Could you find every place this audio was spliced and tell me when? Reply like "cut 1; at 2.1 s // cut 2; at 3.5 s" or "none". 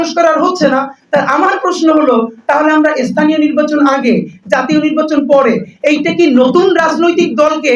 none